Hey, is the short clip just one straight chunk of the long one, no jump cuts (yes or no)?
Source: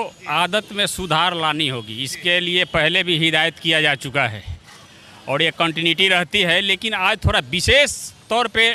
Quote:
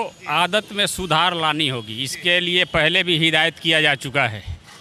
yes